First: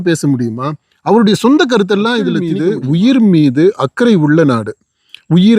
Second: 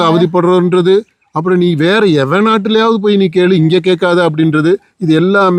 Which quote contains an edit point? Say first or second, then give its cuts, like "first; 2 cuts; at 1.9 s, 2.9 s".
first; 1 cut; at 2.5 s